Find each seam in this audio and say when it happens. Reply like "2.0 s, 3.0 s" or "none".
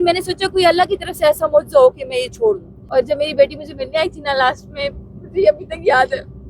2.7 s